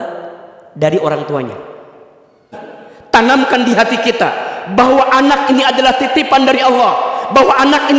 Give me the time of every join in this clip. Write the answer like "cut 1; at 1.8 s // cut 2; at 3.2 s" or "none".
cut 1; at 2.8 s